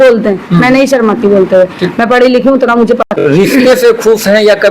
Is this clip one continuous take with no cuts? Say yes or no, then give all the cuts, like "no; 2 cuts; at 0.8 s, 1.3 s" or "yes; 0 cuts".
no; 1 cut; at 3.1 s